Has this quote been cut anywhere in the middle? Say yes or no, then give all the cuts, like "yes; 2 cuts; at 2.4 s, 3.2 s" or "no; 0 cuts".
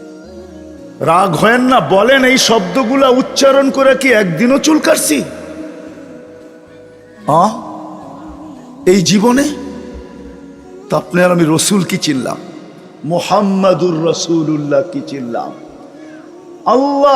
yes; 1 cut; at 1.0 s